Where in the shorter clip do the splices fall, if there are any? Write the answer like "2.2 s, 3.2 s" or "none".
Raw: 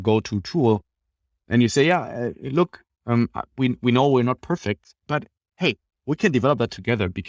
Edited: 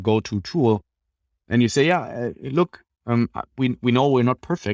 none